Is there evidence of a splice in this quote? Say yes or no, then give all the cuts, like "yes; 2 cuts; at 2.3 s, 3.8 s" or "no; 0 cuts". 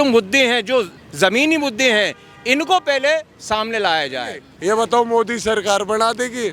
yes; 1 cut; at 4.6 s